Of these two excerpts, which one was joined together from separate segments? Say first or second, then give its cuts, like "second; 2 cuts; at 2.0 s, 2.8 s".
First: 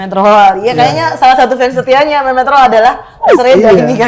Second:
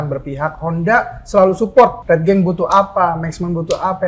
second; 1 cut; at 2.0 s